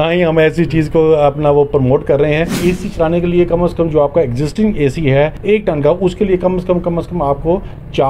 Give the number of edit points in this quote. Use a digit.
2